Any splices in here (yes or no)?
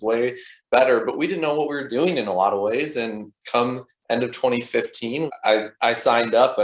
yes